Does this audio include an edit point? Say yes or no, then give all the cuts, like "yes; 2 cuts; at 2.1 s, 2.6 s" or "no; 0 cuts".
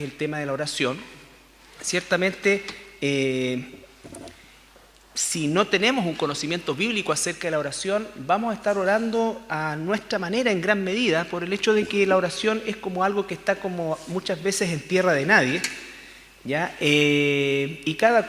yes; 1 cut; at 9.8 s